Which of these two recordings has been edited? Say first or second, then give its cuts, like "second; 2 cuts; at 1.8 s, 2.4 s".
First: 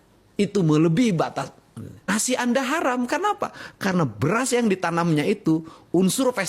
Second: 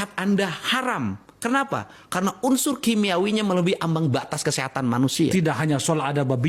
first; 1 cut; at 2.1 s